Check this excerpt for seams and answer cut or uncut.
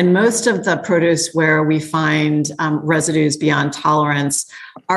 uncut